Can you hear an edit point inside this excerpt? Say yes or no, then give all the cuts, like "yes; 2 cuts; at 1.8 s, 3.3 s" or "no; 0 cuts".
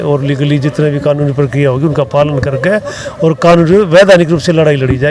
no; 0 cuts